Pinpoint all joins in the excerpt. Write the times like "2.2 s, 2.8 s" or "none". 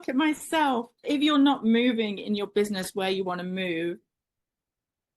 0.9 s